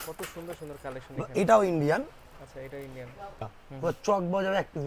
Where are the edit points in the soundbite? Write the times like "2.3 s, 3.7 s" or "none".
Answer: 3.5 s